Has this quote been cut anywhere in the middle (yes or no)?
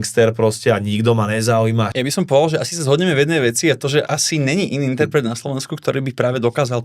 yes